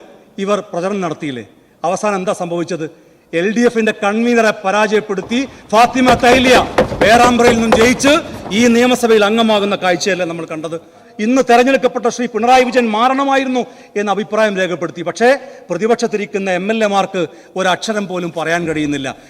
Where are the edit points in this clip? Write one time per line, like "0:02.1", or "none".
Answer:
0:11.0